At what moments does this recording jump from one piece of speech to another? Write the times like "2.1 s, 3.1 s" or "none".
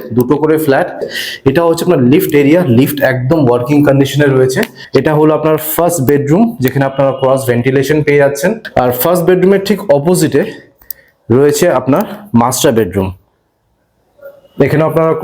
1.1 s, 4.7 s, 8.6 s